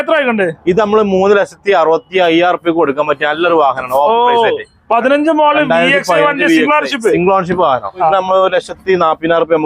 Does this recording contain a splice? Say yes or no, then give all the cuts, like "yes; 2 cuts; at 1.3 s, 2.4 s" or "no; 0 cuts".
yes; 1 cut; at 8.1 s